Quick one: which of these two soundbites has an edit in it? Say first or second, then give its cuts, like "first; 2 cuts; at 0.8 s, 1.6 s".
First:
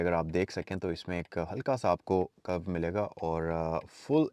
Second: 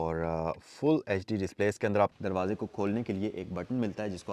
second; 1 cut; at 2.1 s